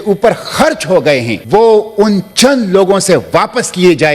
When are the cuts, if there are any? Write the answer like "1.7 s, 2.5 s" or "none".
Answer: 1.4 s